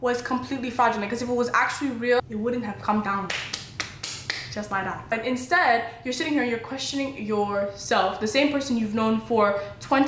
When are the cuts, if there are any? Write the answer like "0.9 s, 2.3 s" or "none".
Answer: 2.2 s, 5.1 s